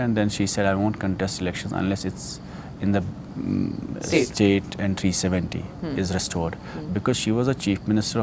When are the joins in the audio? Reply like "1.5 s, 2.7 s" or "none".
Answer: none